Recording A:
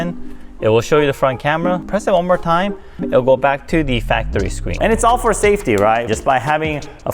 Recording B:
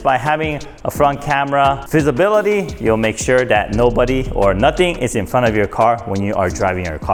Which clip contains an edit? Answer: A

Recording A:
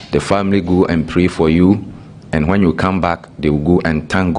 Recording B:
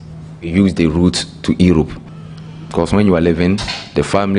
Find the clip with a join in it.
B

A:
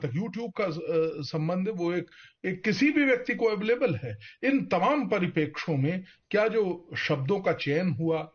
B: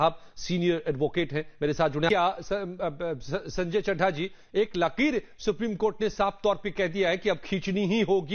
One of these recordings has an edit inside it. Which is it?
B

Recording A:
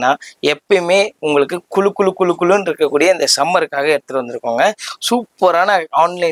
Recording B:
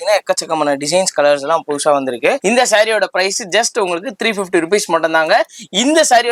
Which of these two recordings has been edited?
B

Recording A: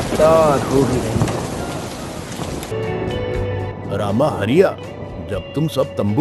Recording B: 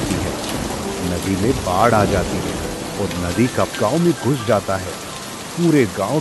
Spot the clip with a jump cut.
A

